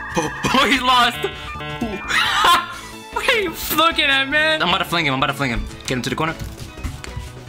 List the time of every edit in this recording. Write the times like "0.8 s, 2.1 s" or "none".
4.6 s